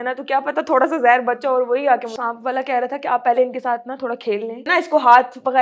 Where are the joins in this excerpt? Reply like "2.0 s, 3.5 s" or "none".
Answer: 2.1 s, 4.6 s